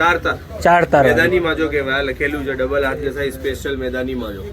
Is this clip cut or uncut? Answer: uncut